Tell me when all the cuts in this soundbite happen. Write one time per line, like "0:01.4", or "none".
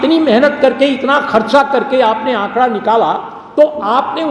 none